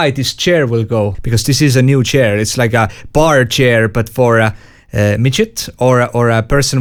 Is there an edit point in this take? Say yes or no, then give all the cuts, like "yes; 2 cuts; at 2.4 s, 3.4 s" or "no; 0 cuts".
no; 0 cuts